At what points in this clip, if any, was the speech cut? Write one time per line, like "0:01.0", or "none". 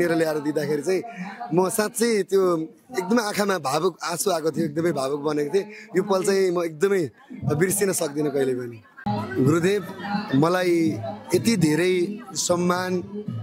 0:08.9